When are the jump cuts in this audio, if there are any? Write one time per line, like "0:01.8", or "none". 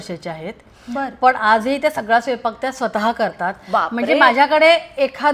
none

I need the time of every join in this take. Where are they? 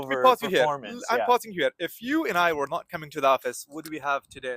none

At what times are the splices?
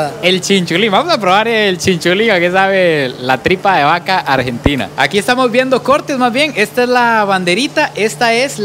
none

